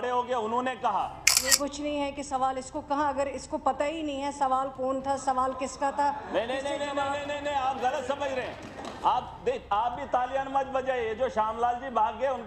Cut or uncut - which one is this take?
cut